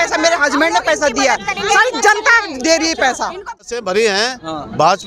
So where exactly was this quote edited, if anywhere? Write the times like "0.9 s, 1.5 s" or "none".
3.5 s